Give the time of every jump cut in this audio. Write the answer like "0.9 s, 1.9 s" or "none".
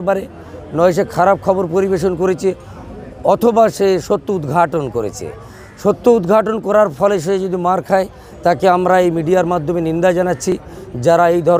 none

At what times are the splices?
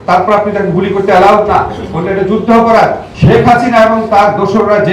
3.1 s

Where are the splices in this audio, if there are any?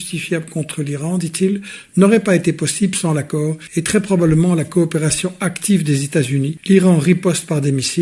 3.6 s, 6.5 s

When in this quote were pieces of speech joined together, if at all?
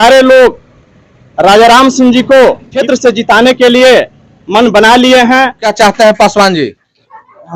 2.7 s, 5.6 s

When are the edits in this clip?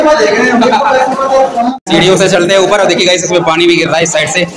1.8 s

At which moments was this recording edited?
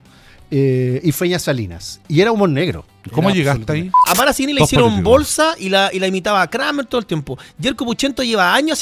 3.9 s

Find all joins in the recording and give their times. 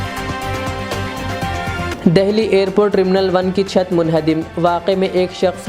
none

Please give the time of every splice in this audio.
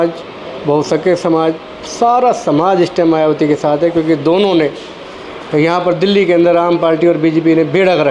none

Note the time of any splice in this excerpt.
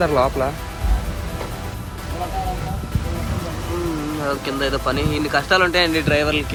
none

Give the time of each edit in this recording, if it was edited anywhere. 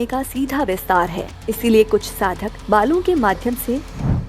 1.3 s, 2.5 s

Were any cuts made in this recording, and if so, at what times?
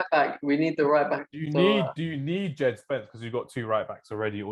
none

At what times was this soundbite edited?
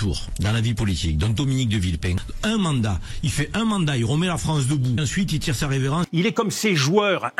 2.3 s, 5.1 s, 6.1 s

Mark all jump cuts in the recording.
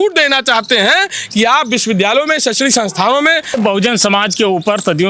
3.6 s

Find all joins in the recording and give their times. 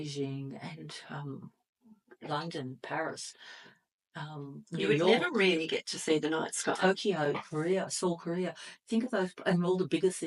none

